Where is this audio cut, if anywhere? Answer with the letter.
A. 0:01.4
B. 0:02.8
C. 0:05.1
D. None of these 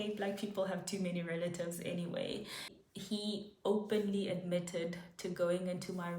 B